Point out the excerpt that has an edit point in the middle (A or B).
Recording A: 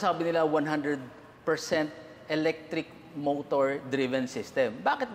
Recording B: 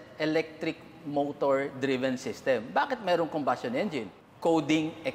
B